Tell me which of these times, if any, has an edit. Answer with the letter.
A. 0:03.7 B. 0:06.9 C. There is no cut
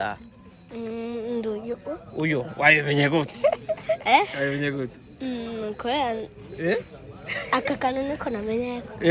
C